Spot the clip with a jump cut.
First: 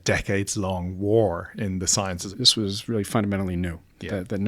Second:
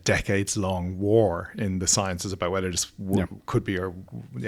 first; 1 cut; at 2.2 s

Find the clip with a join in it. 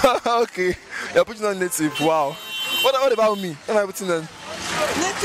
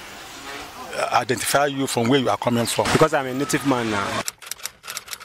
second; 2 cuts; at 2.9 s, 4.2 s

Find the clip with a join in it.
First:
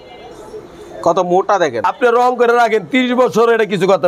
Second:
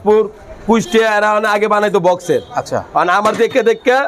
first; 1 cut; at 1.8 s

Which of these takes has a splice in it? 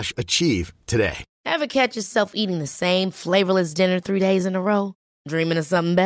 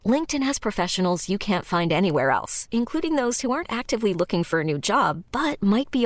first; 1 cut; at 1.3 s

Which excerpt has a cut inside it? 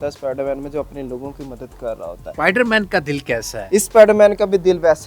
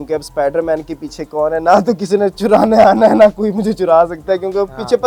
first; 2 cuts; at 2.3 s, 3.5 s

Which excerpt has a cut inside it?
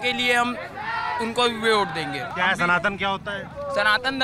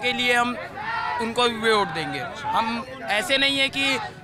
first; 1 cut; at 2.2 s

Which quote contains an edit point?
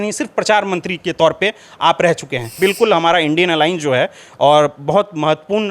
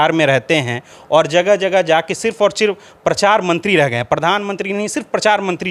first; 1 cut; at 2.6 s

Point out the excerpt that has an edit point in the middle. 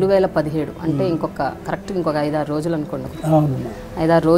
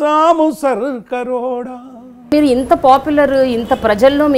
second; 1 cut; at 2.3 s

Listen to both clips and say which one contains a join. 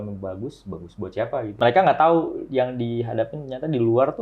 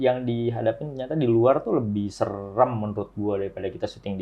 first; 1 cut; at 1.5 s

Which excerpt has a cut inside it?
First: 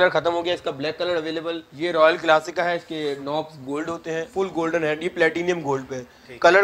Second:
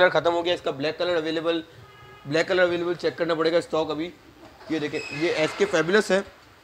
first; 2 cuts; at 1.7 s, 4.3 s

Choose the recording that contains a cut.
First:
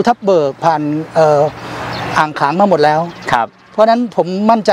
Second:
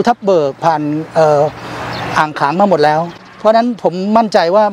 second; 1 cut; at 3.2 s

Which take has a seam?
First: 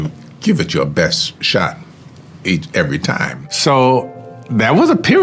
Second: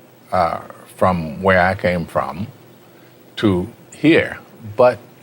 first; 1 cut; at 3.4 s

